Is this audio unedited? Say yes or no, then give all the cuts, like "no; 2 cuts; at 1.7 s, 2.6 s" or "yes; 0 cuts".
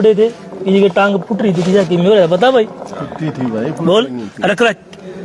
yes; 0 cuts